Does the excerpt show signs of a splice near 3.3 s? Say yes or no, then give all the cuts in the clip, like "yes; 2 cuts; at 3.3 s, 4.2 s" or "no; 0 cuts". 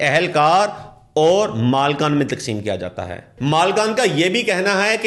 yes; 1 cut; at 3.3 s